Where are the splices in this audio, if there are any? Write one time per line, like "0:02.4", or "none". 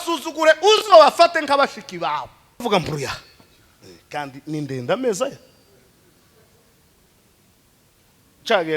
0:02.6